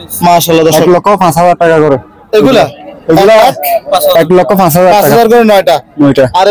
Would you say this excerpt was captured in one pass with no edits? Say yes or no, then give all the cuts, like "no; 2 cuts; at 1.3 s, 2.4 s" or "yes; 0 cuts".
yes; 0 cuts